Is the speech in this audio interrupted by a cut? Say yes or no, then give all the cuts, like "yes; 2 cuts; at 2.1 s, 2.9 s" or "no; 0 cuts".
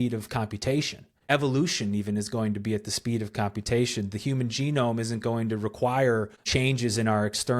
yes; 2 cuts; at 1.2 s, 6.5 s